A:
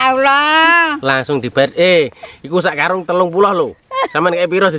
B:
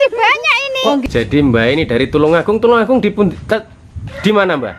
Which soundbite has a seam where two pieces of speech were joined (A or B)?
B